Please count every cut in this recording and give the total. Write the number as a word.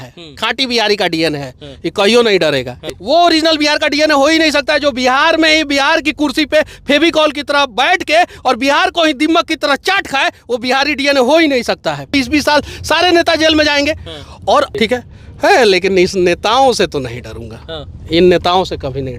three